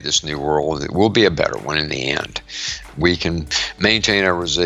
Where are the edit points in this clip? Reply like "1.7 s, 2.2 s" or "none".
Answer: 2.8 s